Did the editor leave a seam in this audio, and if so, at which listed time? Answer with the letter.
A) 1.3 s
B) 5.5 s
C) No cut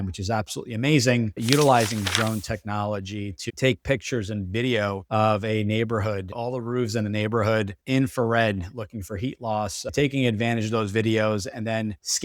A